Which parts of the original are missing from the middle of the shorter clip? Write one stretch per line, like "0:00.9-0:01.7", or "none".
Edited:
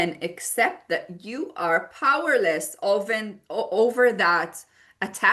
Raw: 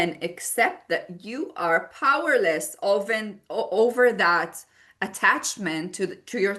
none